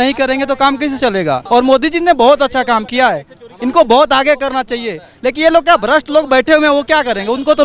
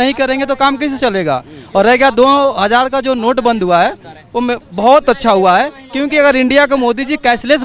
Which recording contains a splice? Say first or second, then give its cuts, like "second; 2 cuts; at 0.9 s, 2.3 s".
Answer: first; 1 cut; at 1.4 s